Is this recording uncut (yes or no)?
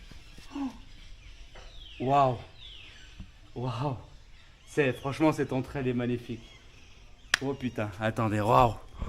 yes